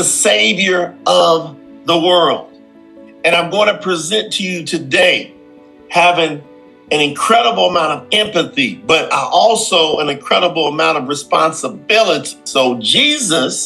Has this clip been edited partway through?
yes; 1 cut; at 12.3 s

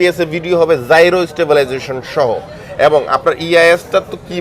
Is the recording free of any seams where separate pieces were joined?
yes; 0 cuts

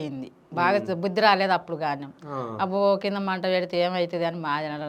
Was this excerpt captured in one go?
yes; 0 cuts

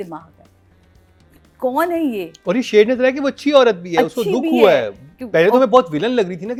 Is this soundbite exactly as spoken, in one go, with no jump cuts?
yes; 0 cuts

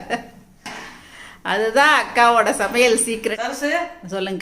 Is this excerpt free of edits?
no; 1 cut; at 3.3 s

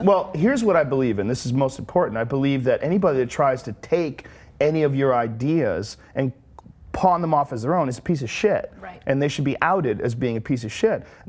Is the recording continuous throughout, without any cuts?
yes; 0 cuts

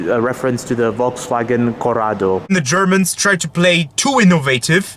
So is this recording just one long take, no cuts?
no; 1 cut; at 2.5 s

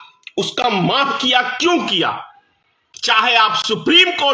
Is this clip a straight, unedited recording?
no; 1 cut; at 2.9 s

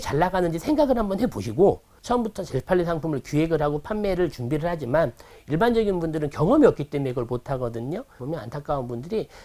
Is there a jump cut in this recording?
yes; 2 cuts; at 1.9 s, 8.2 s

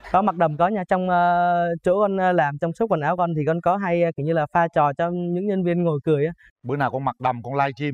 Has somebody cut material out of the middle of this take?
no; 0 cuts

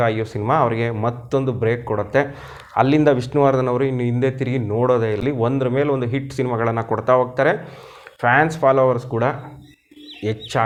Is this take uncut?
yes; 0 cuts

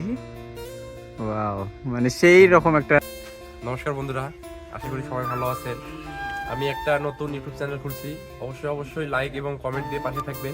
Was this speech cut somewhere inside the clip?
yes; 1 cut; at 3.0 s

